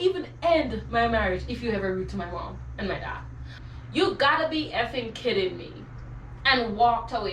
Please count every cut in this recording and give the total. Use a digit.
1